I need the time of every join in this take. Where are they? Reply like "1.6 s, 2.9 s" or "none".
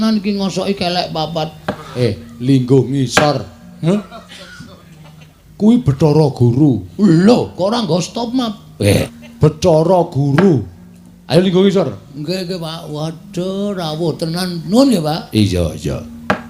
2.0 s, 9.1 s